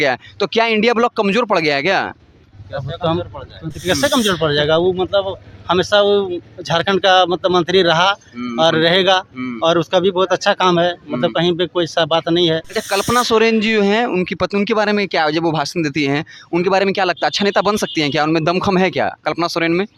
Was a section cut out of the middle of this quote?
no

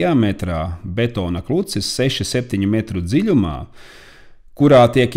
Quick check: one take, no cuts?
yes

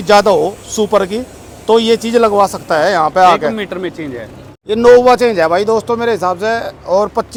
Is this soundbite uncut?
yes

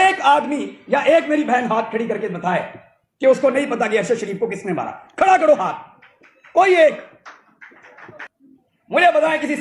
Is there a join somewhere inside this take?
yes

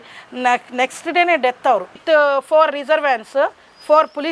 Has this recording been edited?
yes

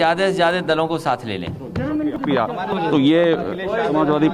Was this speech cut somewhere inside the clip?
yes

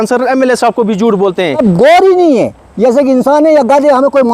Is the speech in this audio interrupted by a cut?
yes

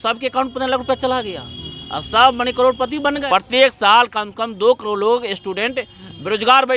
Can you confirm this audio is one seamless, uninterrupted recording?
no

